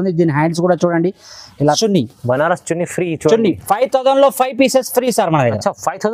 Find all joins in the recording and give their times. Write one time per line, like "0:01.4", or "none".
0:01.8